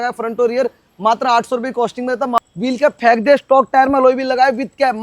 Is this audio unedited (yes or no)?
no